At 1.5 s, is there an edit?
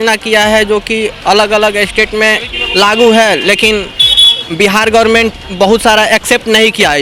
no; 0 cuts

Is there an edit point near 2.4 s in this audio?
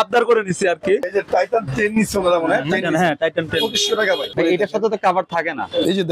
no; 2 cuts; at 1.0 s, 4.3 s

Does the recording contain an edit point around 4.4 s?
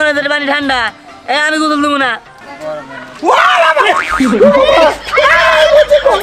no; 1 cut; at 2.5 s

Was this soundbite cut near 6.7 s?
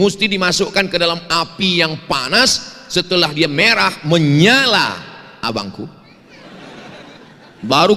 no; 0 cuts

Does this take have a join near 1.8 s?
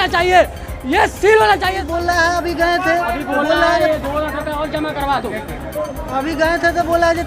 yes; 1 cut; at 1.8 s

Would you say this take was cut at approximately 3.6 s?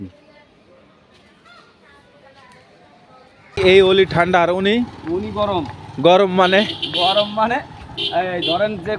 yes; 1 cut; at 3.6 s

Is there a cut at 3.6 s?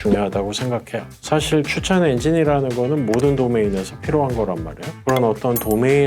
no; 2 cuts; at 1.1 s, 5.0 s

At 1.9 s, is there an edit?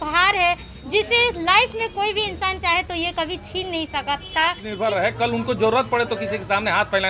no; 1 cut; at 4.7 s

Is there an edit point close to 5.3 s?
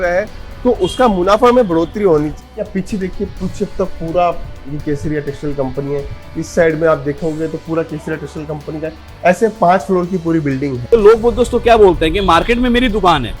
no; 2 cuts; at 2.4 s, 10.7 s

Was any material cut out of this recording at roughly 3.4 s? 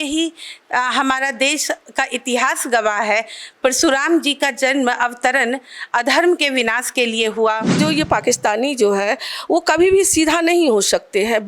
no; 1 cut; at 7.8 s

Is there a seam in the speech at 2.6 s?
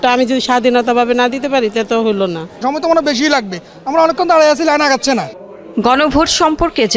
no; 0 cuts

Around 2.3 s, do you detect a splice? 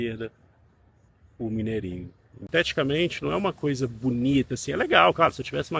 yes; 1 cut; at 2.3 s

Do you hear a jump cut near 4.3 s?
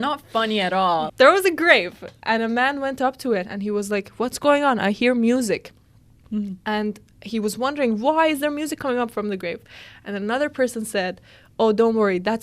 no; 1 cut; at 1.1 s

